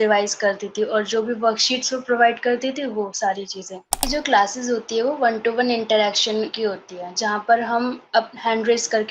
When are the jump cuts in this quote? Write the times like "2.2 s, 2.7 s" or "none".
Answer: 4.0 s